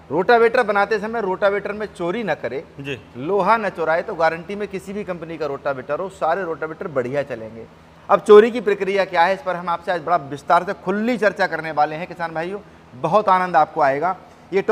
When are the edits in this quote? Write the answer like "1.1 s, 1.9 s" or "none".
none